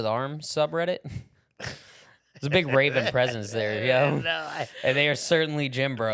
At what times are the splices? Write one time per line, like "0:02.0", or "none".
none

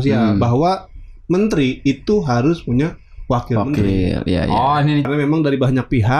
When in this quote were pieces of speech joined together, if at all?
0:05.1

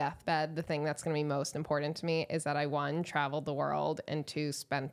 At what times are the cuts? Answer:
none

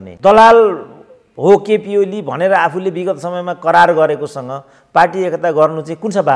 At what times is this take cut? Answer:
none

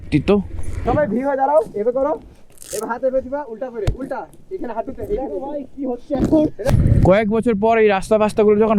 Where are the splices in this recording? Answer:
0:00.8
0:06.7

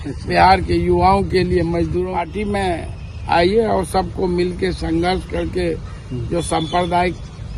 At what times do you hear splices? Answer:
0:02.1

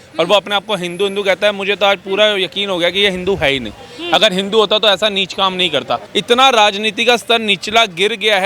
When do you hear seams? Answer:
0:06.1

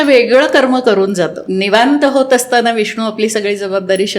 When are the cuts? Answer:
0:01.4

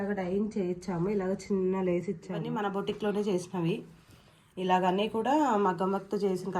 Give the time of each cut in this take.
0:02.4

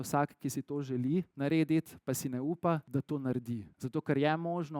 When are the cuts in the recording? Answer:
0:01.3
0:02.8
0:03.7

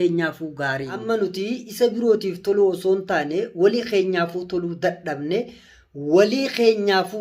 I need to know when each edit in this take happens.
0:01.0

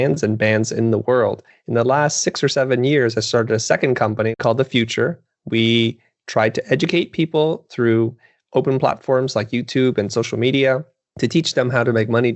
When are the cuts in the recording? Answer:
0:01.5
0:04.4

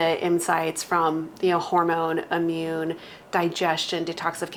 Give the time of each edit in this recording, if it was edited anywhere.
none

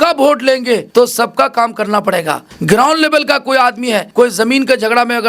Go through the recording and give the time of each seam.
0:00.9
0:02.5
0:04.1

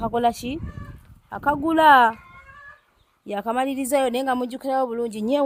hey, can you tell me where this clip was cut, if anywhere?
none

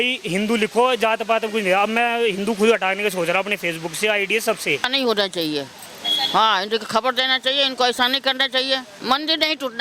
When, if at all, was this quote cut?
0:04.9
0:08.9

